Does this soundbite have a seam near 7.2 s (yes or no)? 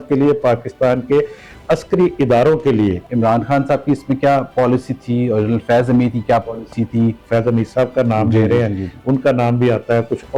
yes